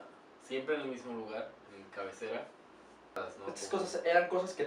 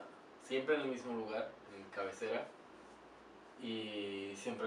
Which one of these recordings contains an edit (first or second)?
first